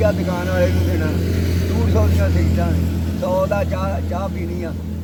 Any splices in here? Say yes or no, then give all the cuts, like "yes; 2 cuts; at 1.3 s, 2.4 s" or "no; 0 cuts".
no; 0 cuts